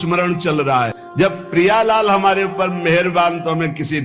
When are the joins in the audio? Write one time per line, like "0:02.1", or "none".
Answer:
0:01.0

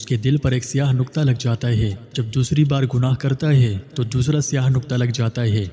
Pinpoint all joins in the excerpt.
0:02.0

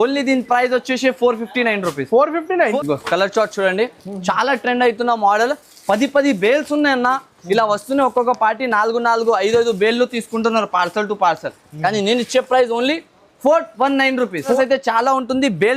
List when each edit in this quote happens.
0:02.8
0:14.5

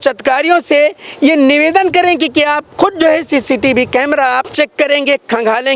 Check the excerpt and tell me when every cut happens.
0:04.5

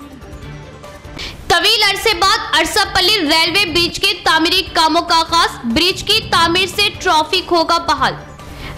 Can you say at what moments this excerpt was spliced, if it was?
0:01.2

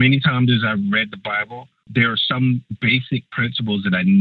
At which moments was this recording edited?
0:01.9
0:02.7

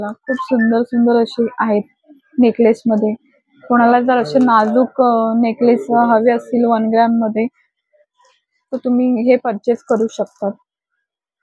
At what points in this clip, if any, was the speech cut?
none

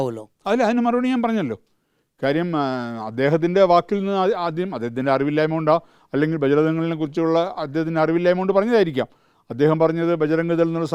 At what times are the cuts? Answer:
none

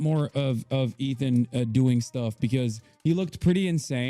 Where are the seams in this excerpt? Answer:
0:02.8

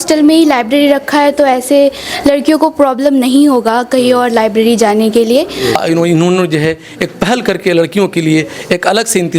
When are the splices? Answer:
0:05.8

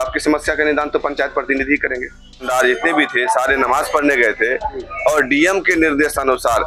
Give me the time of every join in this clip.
0:02.5

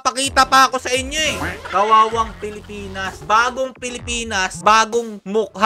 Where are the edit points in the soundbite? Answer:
0:01.6
0:03.1
0:04.5

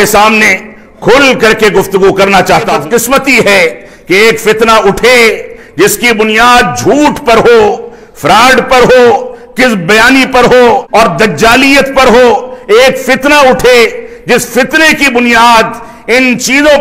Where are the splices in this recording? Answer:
0:02.7
0:10.8

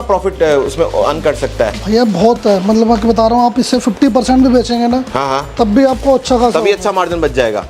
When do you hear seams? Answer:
none

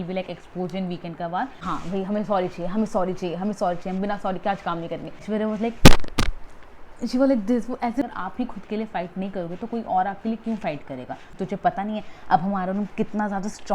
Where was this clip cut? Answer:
0:01.6
0:05.2
0:08.0
0:11.3

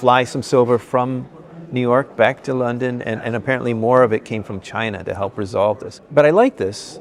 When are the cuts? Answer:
0:05.9

